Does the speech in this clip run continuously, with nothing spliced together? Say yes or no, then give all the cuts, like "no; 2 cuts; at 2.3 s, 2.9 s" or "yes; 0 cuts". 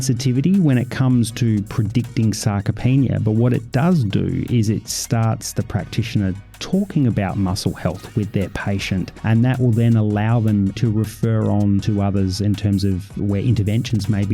no; 3 cuts; at 9.1 s, 10.8 s, 11.9 s